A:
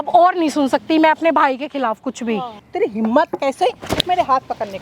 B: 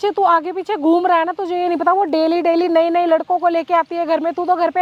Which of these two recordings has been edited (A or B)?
A